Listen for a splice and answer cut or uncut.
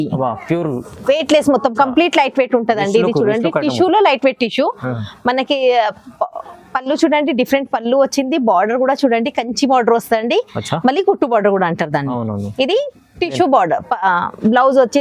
uncut